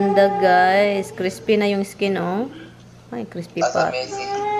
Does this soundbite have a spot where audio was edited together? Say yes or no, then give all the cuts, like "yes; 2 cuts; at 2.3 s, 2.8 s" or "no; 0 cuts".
no; 0 cuts